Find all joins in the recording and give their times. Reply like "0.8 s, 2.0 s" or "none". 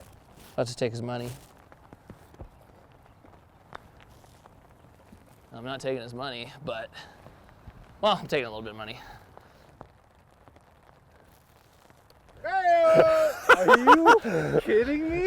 9.5 s

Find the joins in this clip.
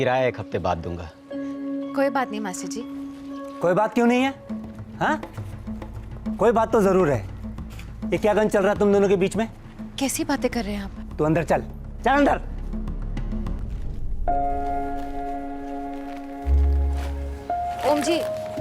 13.6 s

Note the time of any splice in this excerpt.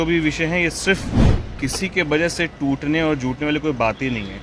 1.2 s

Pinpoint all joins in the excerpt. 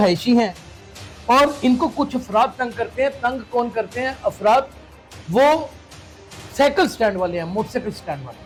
none

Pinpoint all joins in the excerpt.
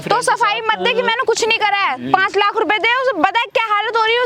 none

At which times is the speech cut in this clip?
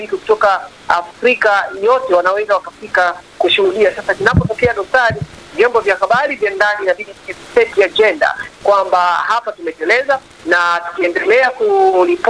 none

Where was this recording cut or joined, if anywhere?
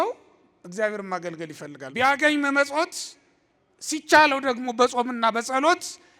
1.8 s

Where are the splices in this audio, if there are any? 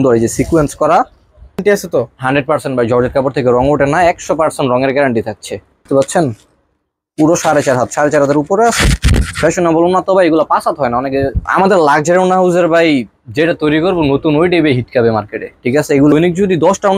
1.6 s, 5.8 s, 11.4 s, 16.1 s

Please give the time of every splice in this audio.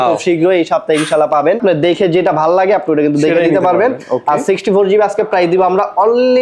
1.6 s

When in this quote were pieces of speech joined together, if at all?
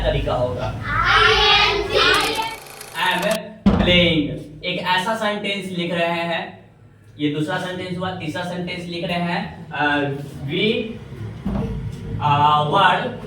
2.5 s

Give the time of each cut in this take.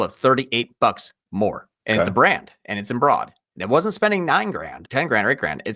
1.7 s, 4.8 s

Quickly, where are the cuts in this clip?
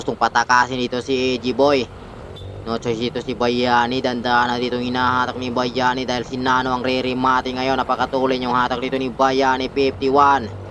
none

